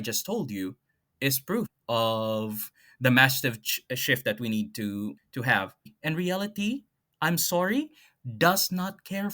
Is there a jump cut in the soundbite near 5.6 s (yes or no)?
yes